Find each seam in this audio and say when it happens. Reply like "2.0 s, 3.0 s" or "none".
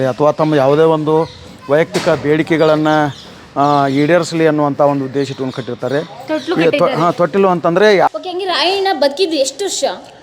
8.1 s

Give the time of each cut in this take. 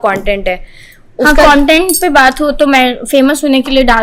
none

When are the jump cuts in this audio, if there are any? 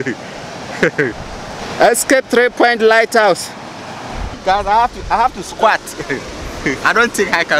1.6 s, 4.3 s

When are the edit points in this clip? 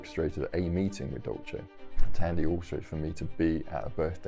1.6 s

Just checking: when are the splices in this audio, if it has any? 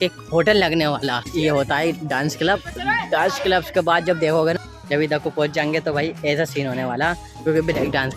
1.3 s, 4.6 s

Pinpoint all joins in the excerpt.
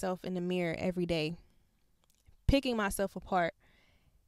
none

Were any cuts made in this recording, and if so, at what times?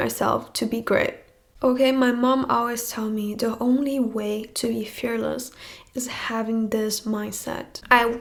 none

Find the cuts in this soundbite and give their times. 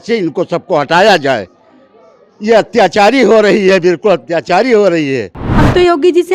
5.4 s

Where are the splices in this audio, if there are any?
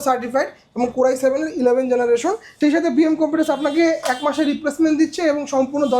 2.5 s

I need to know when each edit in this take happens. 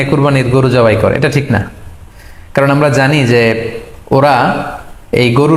none

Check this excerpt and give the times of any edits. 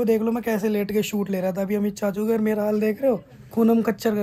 none

